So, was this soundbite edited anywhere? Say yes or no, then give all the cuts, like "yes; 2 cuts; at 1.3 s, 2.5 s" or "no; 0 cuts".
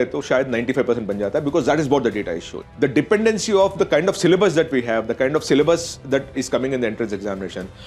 no; 0 cuts